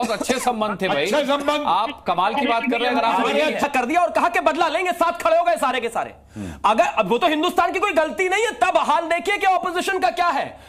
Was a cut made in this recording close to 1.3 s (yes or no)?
no